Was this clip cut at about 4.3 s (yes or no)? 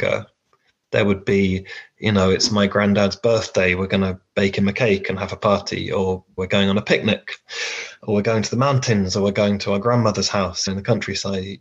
no